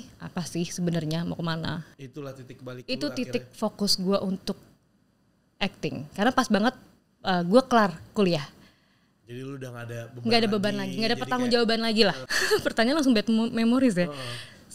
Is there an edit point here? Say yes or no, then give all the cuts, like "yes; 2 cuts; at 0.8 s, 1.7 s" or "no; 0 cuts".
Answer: yes; 2 cuts; at 2.0 s, 12.3 s